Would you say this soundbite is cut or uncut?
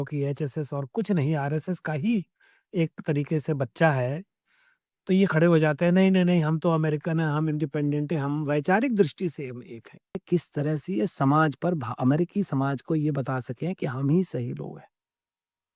cut